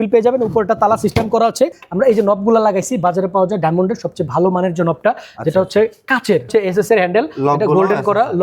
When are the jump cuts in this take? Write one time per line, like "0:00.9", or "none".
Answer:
0:01.8
0:06.5

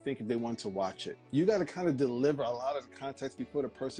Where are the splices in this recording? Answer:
none

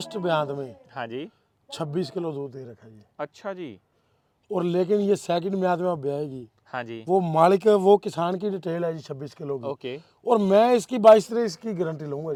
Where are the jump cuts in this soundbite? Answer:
none

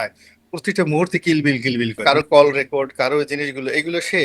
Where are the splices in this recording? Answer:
0:02.0

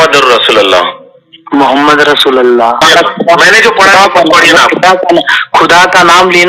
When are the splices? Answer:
0:02.8

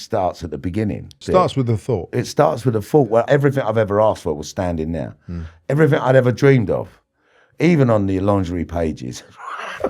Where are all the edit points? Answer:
0:01.2
0:03.3

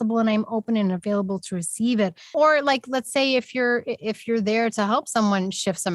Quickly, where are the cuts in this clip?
0:02.3

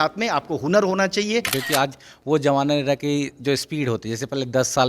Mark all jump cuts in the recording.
0:01.5

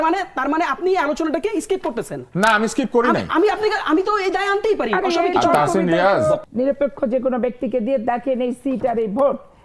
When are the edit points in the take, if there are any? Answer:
0:06.4

